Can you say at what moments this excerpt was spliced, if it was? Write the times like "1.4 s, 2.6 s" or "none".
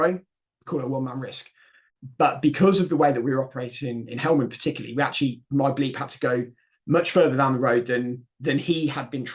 none